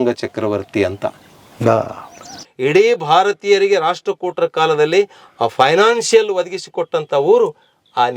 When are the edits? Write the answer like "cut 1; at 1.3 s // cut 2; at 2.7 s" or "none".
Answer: cut 1; at 2.4 s